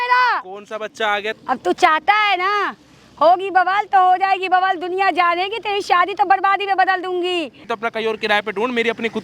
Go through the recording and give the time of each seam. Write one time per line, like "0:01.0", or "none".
0:01.3
0:07.7